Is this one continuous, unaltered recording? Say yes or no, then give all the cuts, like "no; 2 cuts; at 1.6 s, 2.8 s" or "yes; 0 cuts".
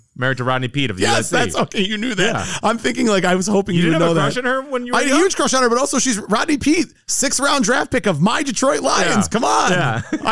yes; 0 cuts